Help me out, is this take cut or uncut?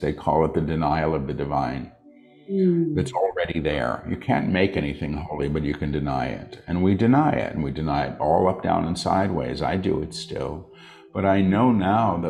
uncut